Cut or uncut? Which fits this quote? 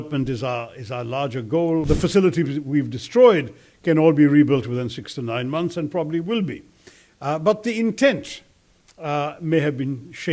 cut